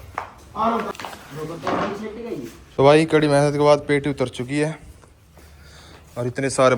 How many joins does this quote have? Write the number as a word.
two